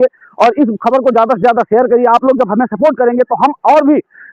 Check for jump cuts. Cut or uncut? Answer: uncut